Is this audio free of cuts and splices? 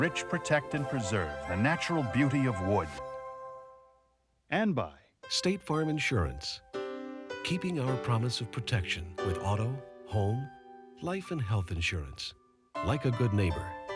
yes; 0 cuts

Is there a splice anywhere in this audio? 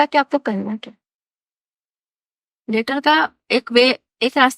no; 0 cuts

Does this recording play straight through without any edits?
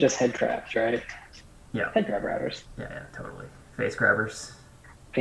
no; 1 cut; at 1.6 s

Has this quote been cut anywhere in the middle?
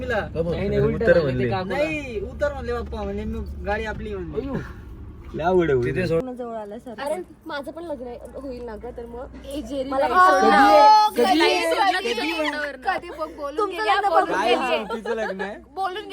yes; 1 cut; at 6.2 s

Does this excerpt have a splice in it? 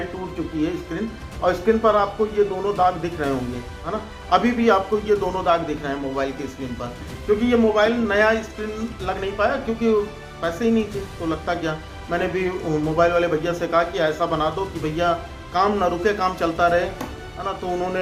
no; 0 cuts

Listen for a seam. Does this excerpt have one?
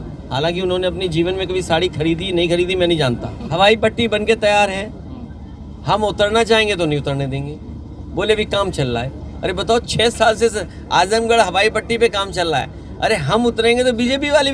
yes; 1 cut; at 3.4 s

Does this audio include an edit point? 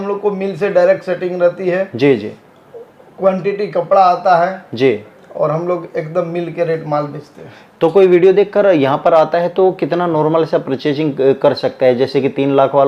no; 0 cuts

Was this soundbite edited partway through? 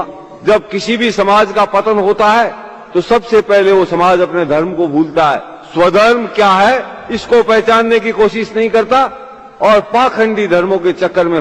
yes; 1 cut; at 1.7 s

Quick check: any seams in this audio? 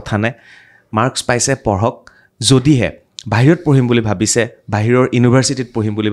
no; 0 cuts

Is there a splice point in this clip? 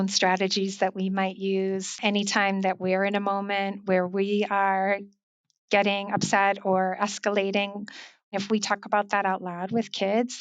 yes; 2 cuts; at 2.0 s, 8.4 s

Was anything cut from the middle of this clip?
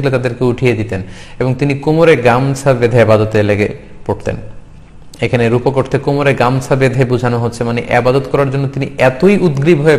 no; 0 cuts

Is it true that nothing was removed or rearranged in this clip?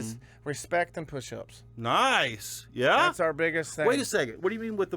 yes; 0 cuts

